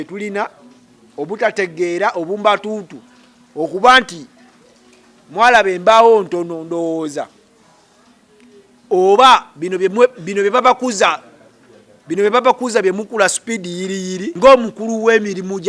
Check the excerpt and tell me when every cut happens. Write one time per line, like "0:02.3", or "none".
0:14.3

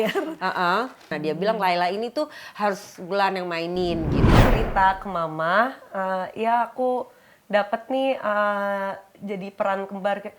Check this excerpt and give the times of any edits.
0:01.1
0:04.4

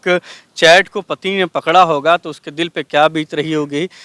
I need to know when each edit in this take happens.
none

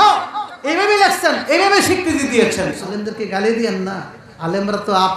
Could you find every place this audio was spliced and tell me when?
0:02.8

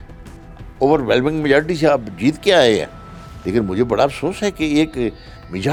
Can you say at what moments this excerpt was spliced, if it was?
none

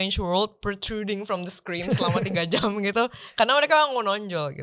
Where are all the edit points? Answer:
none

